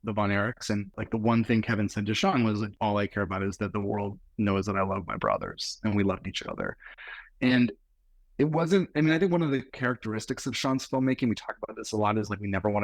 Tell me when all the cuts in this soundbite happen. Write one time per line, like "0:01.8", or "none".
0:00.9
0:02.7